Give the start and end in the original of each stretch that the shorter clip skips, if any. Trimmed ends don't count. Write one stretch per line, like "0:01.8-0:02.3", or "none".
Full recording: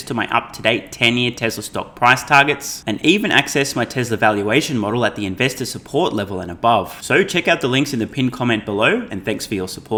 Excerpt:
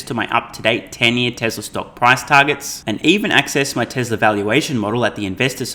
none

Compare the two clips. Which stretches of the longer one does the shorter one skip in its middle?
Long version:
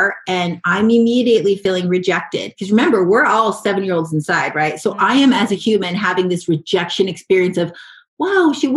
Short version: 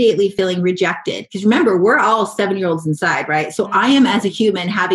none

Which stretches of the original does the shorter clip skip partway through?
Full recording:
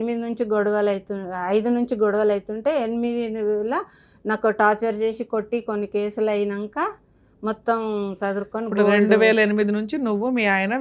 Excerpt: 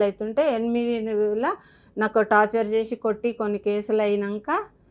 none

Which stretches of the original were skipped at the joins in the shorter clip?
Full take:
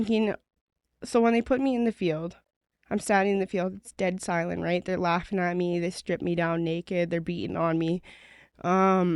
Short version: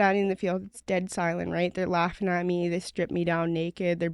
none

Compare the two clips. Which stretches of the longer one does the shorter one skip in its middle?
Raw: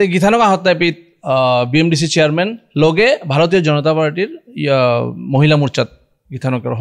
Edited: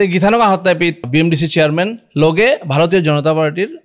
0:01.1-0:01.7

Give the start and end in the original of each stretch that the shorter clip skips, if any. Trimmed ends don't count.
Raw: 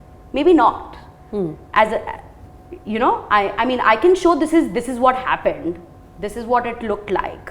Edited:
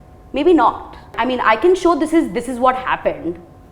0:01.1-0:03.5

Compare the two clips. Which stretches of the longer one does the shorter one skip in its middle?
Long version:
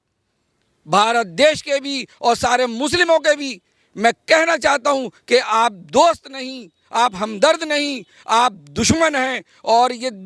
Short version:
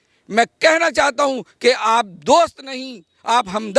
none

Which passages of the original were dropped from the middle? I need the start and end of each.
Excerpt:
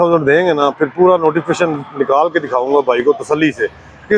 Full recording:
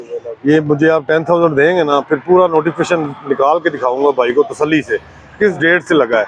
none

